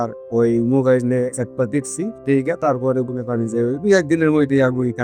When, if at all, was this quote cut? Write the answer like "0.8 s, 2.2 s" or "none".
none

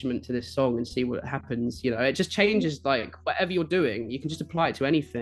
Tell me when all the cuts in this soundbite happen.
none

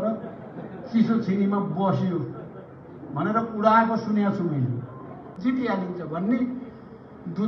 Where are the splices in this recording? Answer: 5.3 s

